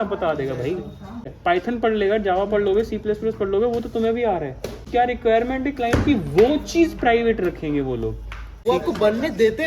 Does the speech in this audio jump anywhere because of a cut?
yes; 3 cuts; at 1.3 s, 4.8 s, 8.6 s

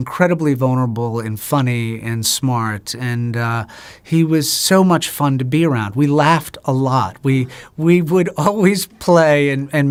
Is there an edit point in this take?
no; 0 cuts

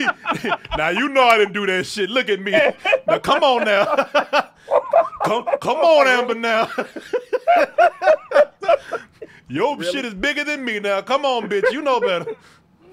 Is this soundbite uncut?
yes; 0 cuts

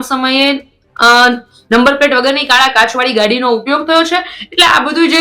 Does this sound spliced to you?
no; 0 cuts

